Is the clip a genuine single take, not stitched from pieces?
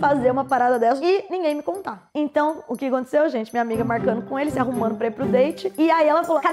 no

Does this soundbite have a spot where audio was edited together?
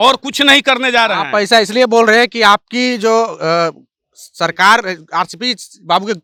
no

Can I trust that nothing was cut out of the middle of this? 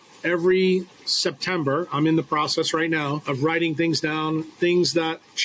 no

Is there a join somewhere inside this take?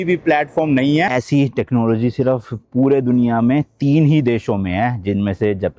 yes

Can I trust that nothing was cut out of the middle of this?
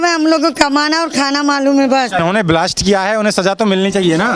no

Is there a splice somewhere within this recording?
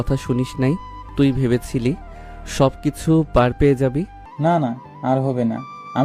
yes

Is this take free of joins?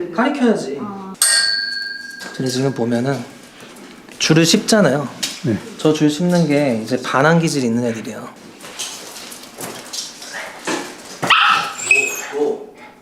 no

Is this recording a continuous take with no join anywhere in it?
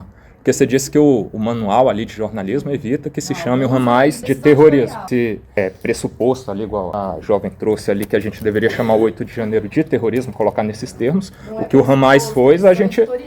no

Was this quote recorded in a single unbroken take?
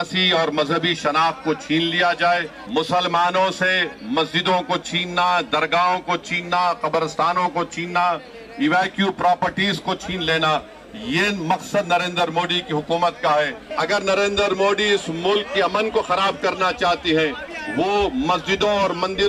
no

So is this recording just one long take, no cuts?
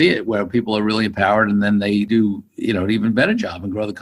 no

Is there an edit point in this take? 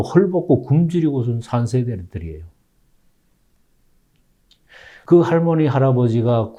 no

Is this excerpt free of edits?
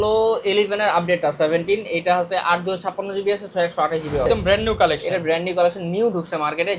no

